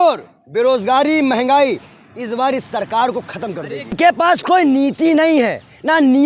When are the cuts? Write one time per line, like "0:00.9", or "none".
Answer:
0:03.9

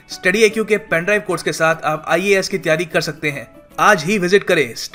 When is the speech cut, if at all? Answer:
none

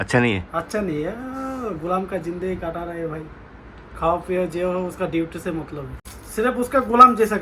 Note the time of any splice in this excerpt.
0:06.1

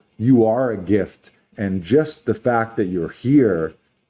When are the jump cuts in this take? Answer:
0:01.5

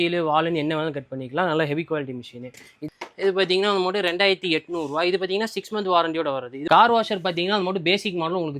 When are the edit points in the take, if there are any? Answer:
0:02.7
0:06.6

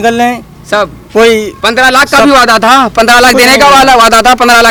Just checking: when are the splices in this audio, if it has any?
none

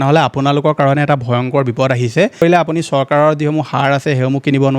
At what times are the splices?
0:02.4

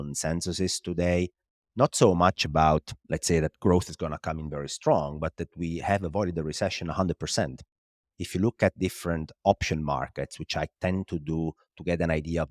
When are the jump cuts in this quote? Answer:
0:03.0

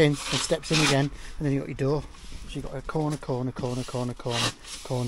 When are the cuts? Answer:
none

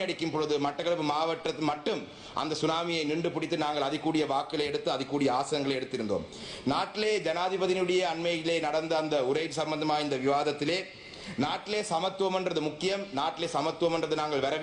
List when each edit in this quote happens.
none

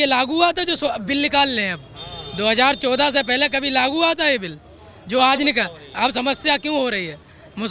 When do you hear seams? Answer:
none

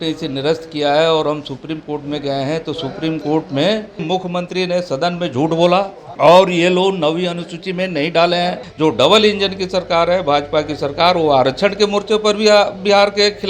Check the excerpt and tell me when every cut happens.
0:04.0
0:06.0
0:08.6

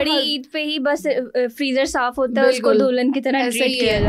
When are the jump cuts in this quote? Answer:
none

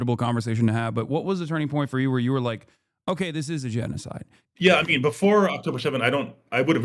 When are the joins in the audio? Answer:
0:04.3

